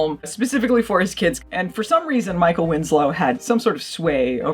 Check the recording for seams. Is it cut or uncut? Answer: cut